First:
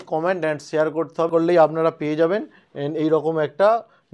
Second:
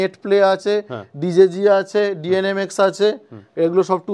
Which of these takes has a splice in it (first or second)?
first